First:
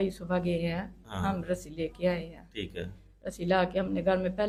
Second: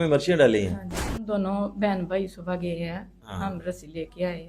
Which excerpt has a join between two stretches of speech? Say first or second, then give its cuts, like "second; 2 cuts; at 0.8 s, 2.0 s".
second; 1 cut; at 1.2 s